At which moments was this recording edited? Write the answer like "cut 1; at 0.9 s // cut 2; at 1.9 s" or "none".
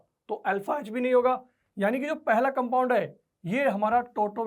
none